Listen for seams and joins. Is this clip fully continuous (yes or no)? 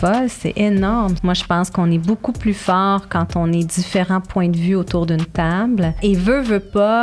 no